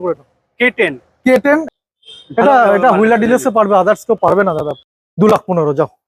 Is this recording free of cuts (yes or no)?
no